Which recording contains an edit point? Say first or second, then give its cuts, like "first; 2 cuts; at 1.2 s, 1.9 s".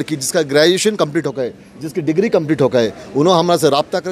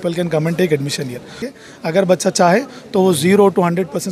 second; 1 cut; at 1.5 s